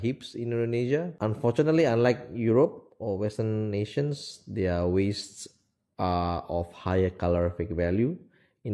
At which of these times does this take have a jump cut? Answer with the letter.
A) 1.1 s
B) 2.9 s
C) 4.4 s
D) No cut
A